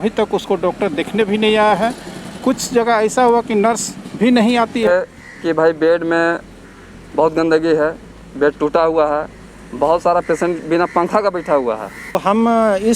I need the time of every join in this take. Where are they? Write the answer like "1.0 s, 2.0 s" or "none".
4.9 s, 12.2 s